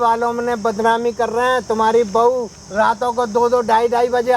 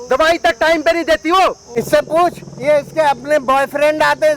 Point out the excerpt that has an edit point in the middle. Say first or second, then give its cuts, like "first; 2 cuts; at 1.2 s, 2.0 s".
second; 1 cut; at 1.7 s